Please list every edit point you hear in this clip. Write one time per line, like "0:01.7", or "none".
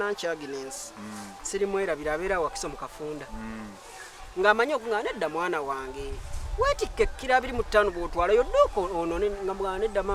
none